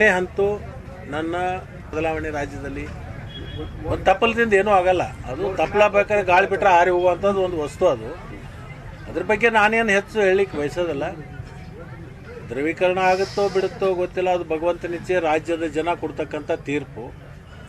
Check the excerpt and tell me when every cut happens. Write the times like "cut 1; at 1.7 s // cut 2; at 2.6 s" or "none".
cut 1; at 1.8 s

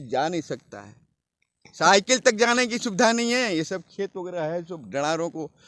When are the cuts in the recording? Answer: none

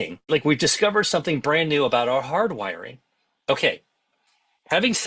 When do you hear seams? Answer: none

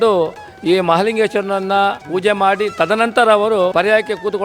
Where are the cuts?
cut 1; at 2.0 s // cut 2; at 3.7 s

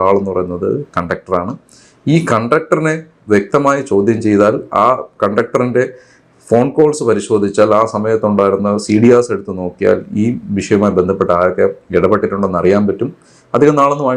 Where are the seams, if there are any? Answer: none

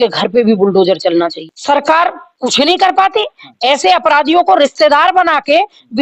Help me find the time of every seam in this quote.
cut 1; at 1.5 s

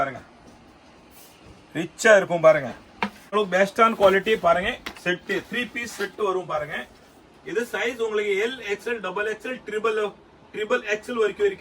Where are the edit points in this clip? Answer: cut 1; at 3.3 s

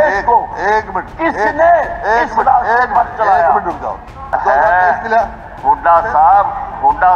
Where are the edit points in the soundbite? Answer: cut 1; at 4.4 s

